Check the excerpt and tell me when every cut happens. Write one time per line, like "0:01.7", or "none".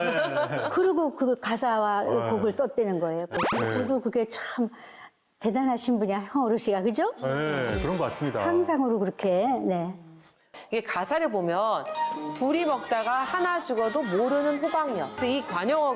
0:03.4
0:10.6
0:15.1